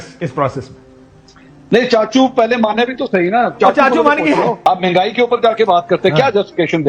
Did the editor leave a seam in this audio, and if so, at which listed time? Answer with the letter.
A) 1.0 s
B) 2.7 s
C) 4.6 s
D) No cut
C